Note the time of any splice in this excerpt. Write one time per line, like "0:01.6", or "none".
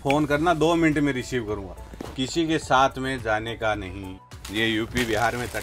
0:04.4